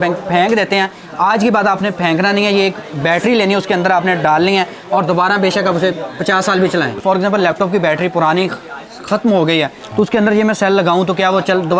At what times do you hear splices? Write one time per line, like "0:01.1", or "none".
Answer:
0:06.9